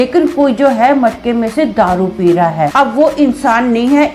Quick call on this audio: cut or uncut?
cut